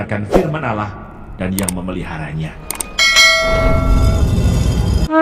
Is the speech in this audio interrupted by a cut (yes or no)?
no